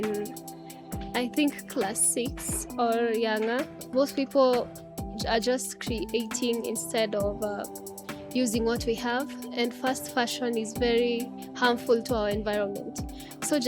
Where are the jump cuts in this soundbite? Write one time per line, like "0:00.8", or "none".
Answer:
0:03.9